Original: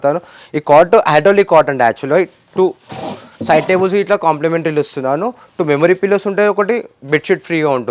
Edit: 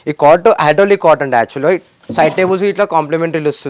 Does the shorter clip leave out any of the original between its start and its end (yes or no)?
yes